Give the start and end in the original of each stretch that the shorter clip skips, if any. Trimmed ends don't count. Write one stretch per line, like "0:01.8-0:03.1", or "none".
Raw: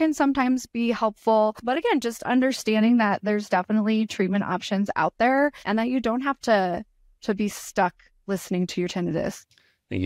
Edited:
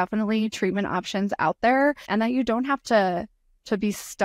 none